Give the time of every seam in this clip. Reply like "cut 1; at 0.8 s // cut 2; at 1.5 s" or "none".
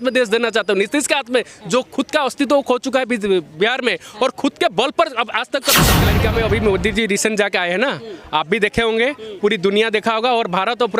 cut 1; at 6.0 s